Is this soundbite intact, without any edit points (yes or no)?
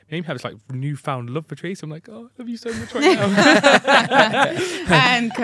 yes